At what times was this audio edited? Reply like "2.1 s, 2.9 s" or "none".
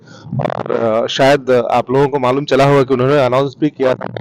none